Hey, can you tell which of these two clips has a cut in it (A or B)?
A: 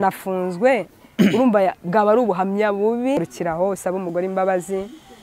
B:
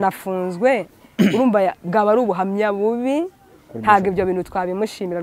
A